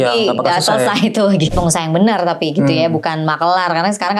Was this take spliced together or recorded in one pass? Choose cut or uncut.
cut